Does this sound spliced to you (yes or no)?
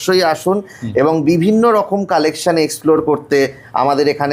no